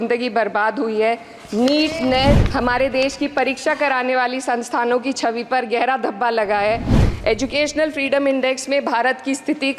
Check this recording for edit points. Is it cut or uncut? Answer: cut